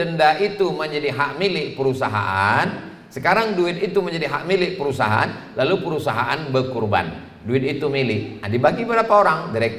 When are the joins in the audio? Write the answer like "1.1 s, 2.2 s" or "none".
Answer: none